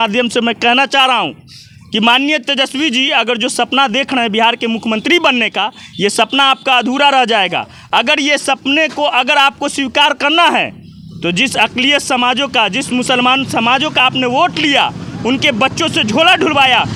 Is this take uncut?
yes; 0 cuts

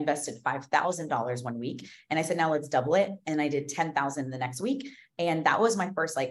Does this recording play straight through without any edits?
yes; 0 cuts

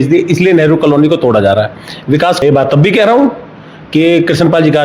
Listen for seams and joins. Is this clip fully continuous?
no; 1 cut; at 2.4 s

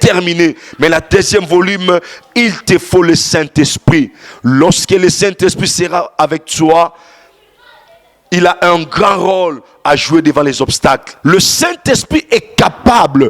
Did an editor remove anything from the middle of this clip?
yes; 1 cut; at 11.1 s

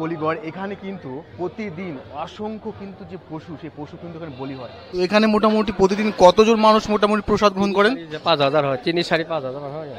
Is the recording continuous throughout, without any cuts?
no; 1 cut; at 4.7 s

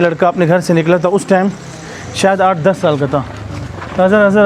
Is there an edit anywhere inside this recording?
no; 0 cuts

